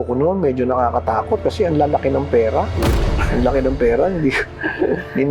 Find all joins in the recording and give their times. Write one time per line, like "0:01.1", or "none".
none